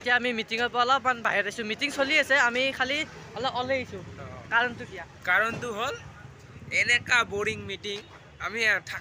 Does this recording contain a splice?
no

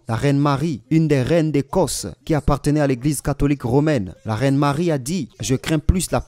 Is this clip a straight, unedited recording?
no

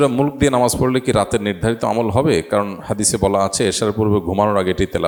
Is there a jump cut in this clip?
no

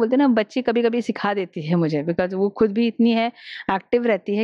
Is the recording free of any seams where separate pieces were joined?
yes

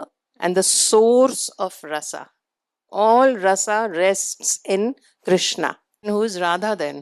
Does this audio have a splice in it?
yes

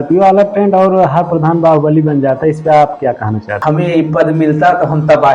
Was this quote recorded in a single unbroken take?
no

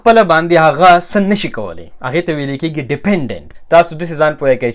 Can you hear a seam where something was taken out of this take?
yes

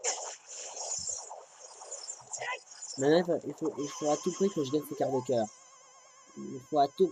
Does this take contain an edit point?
no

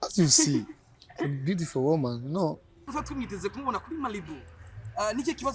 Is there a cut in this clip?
yes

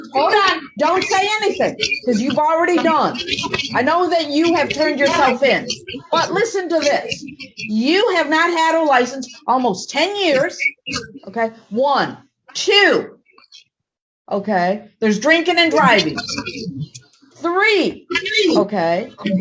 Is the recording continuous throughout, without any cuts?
yes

